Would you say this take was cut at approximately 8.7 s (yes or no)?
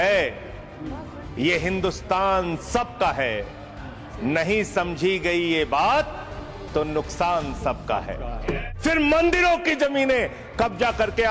yes